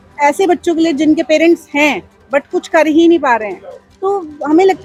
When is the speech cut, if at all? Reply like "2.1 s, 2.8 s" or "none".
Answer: none